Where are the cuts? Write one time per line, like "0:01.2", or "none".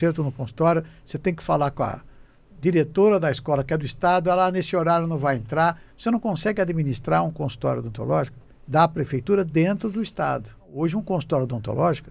0:10.8